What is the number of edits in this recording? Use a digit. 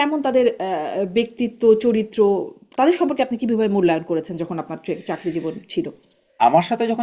0